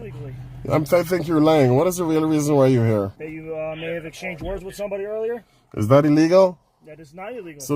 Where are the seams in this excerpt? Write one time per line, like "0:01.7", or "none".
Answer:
0:03.2